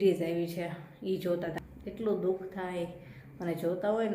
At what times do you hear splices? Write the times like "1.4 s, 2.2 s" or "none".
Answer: 1.6 s